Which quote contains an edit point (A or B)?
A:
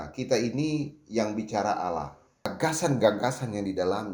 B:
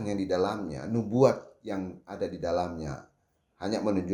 A